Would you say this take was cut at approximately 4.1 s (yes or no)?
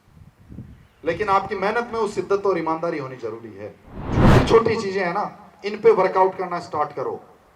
yes